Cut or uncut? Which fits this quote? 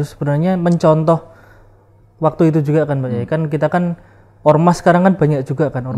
uncut